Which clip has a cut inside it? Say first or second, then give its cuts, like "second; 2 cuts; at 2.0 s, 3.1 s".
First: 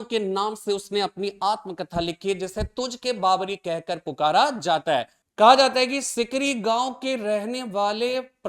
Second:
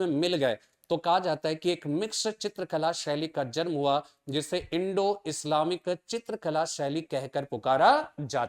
first; 1 cut; at 5.2 s